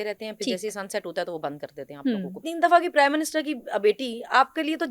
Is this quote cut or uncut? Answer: cut